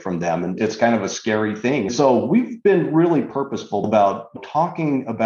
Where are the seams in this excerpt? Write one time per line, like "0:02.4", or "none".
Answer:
0:01.9
0:03.9